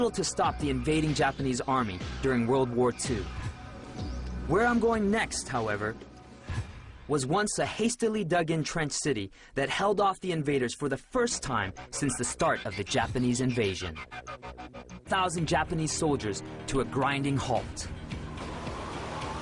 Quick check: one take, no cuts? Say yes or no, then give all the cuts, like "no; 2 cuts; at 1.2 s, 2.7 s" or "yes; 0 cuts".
yes; 0 cuts